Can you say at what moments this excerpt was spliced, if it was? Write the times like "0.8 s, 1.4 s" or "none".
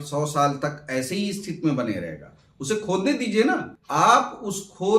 3.8 s